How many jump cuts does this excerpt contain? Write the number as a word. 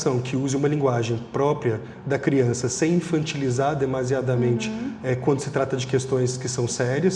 zero